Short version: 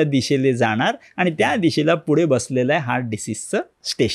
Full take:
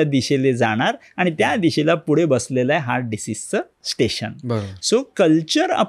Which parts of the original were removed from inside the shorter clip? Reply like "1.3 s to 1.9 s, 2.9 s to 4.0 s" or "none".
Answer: none